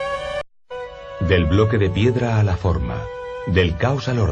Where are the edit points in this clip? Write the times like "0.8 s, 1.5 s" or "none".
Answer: 2.8 s

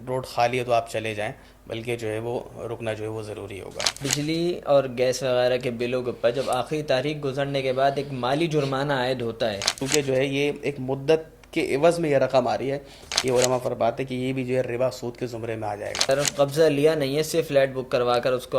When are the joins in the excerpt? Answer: 4.0 s, 9.8 s, 13.1 s, 16.1 s

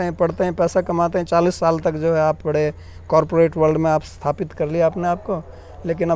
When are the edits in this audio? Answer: none

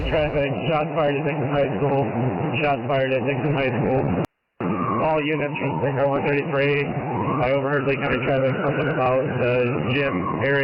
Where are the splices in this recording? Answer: none

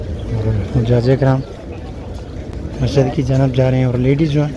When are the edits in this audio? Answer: none

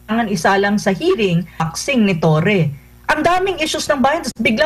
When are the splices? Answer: 1.7 s

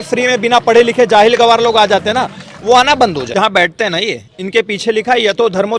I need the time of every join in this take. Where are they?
3.3 s

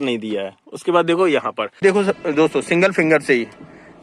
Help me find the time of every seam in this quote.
1.8 s

